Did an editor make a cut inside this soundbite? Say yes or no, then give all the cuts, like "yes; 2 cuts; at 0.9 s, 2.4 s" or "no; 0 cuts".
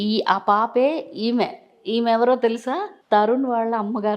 yes; 1 cut; at 2.9 s